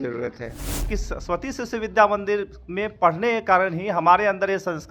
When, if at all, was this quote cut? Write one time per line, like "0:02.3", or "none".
0:00.9